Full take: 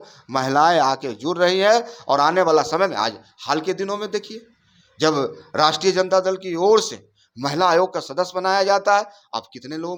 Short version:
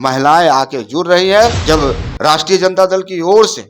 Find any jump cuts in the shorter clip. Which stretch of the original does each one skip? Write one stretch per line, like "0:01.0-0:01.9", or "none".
0:01.9-0:04.9